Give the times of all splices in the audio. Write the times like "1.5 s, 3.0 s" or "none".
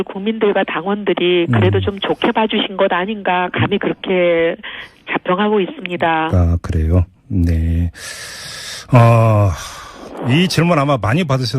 7.6 s